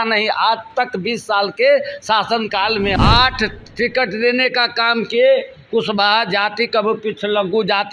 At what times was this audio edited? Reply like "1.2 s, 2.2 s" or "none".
3.0 s